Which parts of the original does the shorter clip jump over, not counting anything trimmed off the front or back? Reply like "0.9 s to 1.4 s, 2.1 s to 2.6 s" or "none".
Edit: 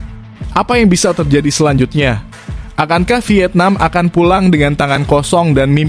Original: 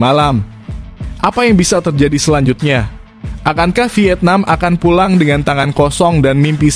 none